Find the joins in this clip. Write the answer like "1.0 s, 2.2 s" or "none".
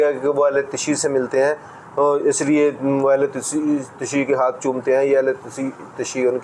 none